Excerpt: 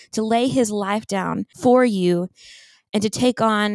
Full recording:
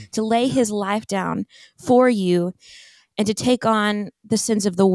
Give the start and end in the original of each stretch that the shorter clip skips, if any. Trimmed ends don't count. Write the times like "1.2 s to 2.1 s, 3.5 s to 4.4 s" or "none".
1.4 s to 1.7 s